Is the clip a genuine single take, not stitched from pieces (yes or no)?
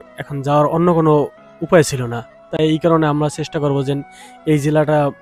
yes